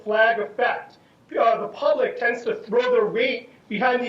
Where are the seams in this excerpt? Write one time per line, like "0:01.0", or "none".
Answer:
0:01.6